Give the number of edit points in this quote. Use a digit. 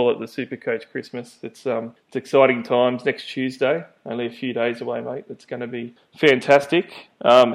2